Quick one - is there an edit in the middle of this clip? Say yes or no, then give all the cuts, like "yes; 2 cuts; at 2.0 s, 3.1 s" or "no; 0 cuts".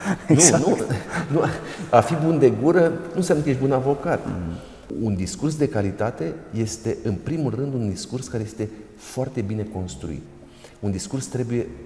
yes; 2 cuts; at 4.9 s, 10.3 s